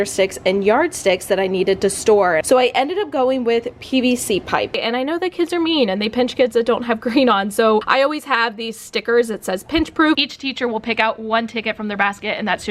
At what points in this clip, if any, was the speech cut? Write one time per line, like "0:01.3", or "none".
0:02.4
0:04.8
0:10.2